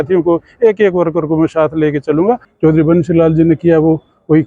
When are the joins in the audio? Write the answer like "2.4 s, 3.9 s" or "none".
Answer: 2.5 s